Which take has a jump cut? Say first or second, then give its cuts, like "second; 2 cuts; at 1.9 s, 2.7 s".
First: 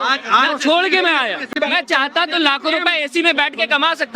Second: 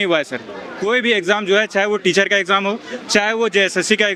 first; 1 cut; at 1.5 s